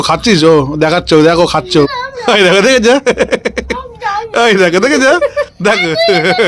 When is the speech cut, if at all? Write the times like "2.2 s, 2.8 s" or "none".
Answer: 2.0 s